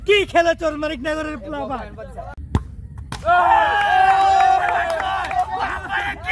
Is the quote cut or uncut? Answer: uncut